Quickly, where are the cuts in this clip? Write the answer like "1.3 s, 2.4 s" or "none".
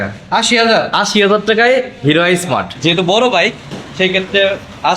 2.7 s